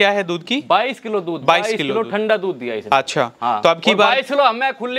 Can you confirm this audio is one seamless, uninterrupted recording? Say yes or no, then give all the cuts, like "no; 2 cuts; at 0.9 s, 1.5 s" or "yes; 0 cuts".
yes; 0 cuts